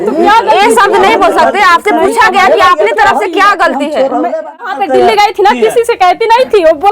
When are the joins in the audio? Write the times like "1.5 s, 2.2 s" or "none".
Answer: 4.7 s